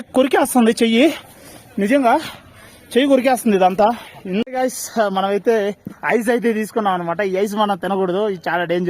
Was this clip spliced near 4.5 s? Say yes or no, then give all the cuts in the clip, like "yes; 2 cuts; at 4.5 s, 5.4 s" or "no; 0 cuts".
yes; 1 cut; at 4.5 s